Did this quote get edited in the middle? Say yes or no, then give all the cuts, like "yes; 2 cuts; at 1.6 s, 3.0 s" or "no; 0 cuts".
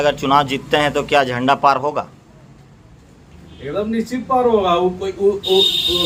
no; 0 cuts